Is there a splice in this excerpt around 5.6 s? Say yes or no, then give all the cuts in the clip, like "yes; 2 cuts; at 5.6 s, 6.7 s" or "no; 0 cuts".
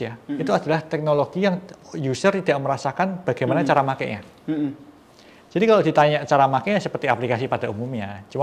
no; 0 cuts